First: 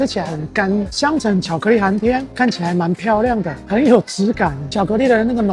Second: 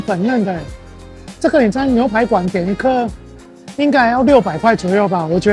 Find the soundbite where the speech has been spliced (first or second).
first